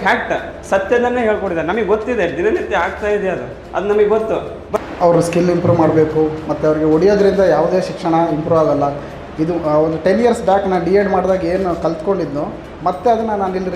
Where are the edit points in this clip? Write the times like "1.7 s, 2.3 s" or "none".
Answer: 4.6 s